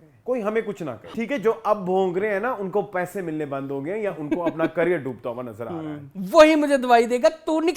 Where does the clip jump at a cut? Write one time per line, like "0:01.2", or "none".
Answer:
0:01.1
0:06.1